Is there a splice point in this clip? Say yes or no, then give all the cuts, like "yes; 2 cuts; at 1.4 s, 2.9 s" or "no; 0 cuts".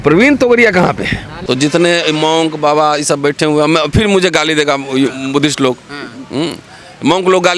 yes; 1 cut; at 1.3 s